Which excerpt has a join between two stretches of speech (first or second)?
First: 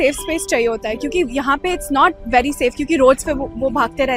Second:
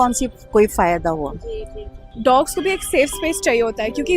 second